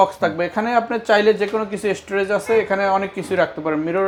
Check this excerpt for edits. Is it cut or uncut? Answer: uncut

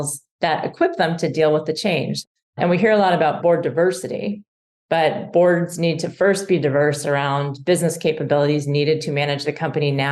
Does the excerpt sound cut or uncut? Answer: cut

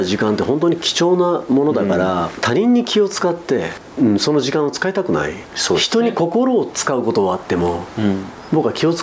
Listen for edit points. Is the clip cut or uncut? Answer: cut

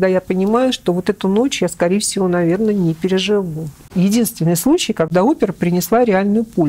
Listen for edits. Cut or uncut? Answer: cut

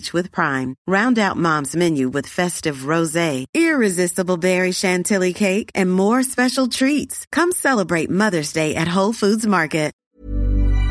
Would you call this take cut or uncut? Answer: cut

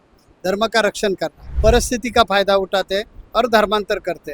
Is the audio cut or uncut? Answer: cut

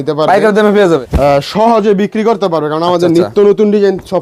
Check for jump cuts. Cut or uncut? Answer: cut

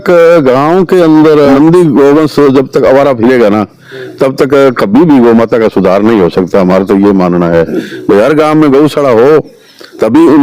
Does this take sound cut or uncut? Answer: cut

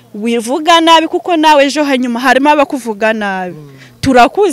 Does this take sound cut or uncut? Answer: uncut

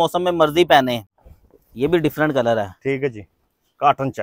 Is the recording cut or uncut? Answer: cut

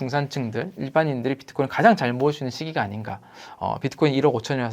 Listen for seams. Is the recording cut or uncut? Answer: cut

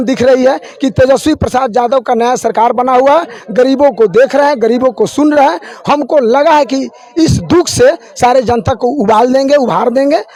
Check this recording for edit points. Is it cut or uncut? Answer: uncut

